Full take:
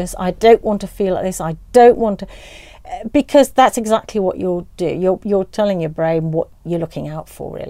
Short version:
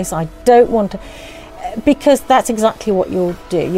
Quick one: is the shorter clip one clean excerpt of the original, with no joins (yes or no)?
yes